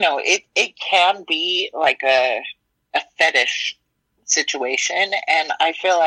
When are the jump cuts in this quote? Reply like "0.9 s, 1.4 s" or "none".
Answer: none